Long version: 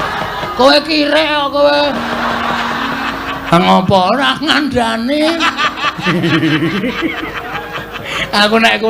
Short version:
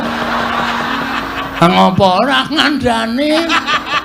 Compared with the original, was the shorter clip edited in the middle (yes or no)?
no